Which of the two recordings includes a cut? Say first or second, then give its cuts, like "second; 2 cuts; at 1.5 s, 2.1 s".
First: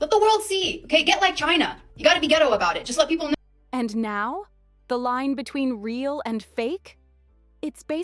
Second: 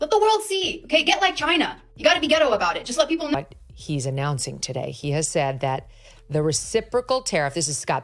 second; 1 cut; at 3.4 s